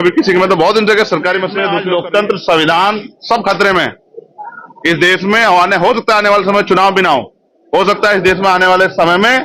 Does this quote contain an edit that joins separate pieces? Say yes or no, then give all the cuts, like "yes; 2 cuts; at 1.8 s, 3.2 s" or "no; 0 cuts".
yes; 1 cut; at 1.7 s